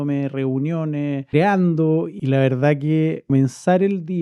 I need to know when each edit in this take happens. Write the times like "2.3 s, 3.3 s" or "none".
1.3 s, 2.1 s, 3.3 s